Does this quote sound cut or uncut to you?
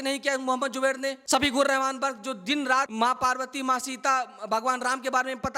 cut